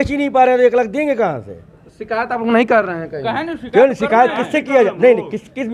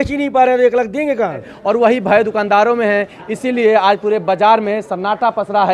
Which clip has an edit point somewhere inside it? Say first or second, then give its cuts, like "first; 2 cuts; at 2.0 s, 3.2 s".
second; 1 cut; at 1.5 s